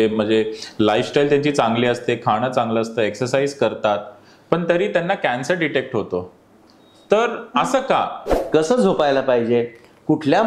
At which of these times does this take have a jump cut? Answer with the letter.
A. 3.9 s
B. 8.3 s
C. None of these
B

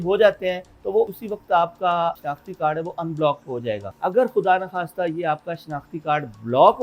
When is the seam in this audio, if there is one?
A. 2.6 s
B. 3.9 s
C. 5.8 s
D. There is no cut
B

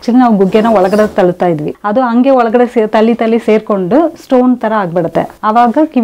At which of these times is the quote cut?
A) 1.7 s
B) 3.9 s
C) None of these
A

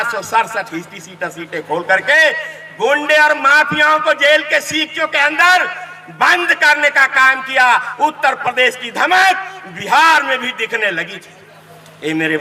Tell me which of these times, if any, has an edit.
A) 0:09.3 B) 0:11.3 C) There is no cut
C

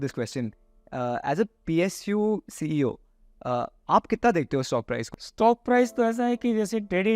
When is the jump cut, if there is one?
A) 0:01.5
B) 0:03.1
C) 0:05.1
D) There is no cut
C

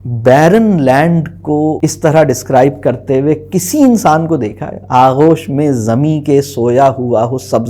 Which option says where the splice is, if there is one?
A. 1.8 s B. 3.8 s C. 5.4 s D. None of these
A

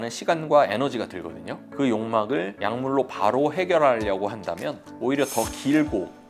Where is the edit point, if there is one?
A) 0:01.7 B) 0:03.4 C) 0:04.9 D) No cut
A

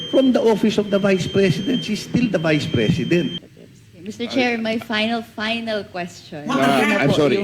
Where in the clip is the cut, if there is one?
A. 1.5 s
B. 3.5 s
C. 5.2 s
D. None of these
B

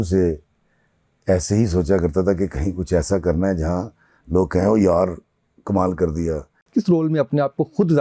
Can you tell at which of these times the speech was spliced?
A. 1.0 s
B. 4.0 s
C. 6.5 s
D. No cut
C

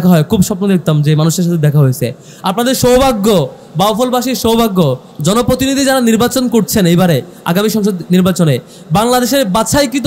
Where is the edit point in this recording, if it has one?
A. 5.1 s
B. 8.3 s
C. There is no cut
A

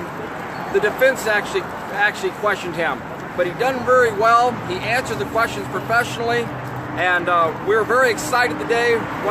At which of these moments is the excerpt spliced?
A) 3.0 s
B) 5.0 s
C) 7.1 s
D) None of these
C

